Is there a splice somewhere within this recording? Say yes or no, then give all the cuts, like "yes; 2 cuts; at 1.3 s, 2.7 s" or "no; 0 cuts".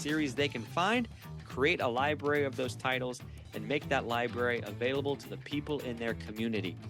no; 0 cuts